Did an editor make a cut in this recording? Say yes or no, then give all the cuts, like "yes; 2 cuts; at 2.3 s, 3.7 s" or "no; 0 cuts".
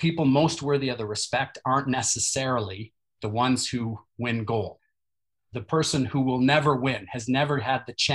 yes; 1 cut; at 4.9 s